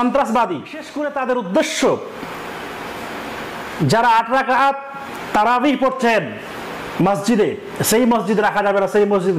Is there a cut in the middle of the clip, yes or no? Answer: yes